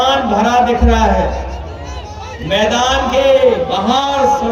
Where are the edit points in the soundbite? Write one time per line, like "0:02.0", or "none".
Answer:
none